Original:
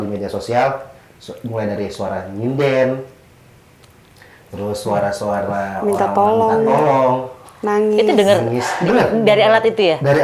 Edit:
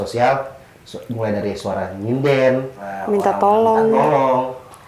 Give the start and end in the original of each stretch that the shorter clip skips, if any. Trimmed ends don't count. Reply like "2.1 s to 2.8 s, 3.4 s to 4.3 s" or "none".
3.3 s to 5.7 s